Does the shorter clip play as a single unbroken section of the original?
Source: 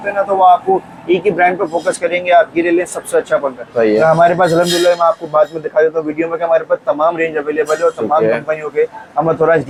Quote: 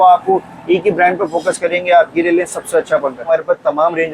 no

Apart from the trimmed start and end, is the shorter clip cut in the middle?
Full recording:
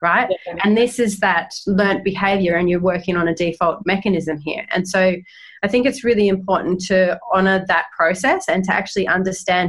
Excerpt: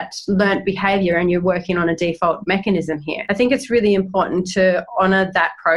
yes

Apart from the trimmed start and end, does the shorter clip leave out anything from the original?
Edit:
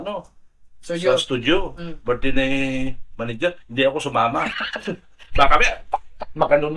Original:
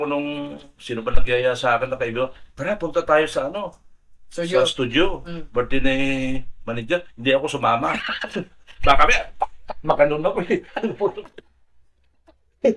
no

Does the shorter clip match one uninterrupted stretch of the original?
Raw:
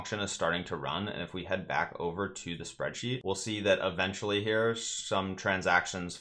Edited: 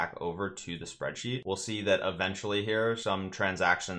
no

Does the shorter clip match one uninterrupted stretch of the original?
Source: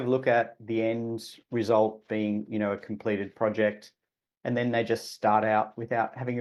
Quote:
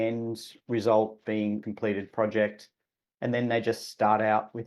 no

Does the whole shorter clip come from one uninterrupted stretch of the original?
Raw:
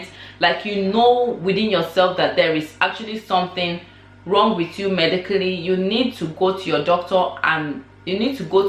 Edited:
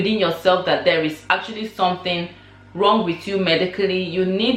yes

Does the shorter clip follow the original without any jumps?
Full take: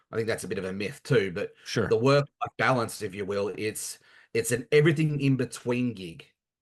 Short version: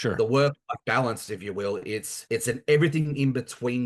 no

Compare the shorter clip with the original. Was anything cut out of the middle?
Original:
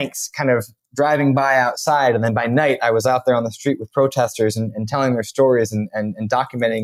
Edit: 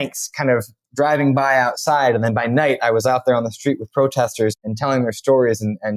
yes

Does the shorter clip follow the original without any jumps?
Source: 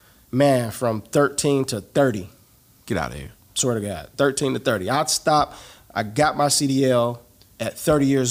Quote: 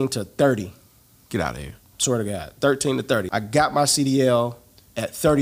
no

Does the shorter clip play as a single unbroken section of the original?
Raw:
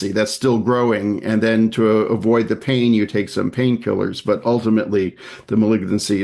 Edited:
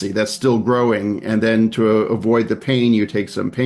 yes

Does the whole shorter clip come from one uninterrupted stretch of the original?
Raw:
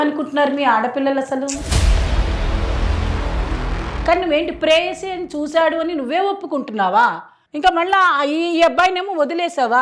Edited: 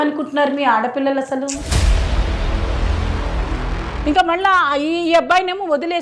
no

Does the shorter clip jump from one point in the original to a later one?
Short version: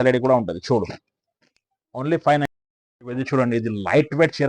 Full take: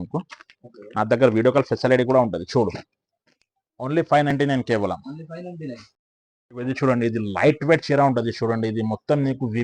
yes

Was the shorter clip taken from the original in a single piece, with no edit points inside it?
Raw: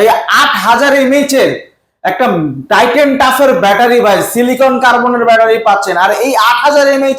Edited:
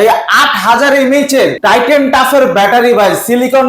no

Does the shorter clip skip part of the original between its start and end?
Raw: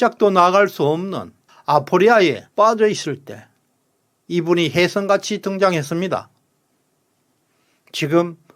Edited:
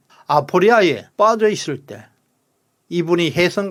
no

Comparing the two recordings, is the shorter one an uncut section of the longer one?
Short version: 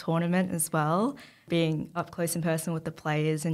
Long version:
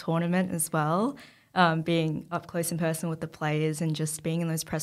no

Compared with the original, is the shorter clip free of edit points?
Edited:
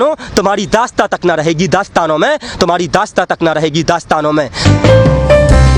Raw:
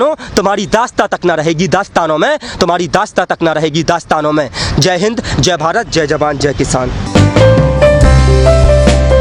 no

